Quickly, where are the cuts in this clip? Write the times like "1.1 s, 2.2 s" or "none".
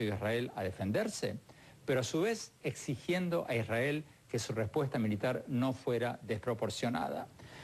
5.7 s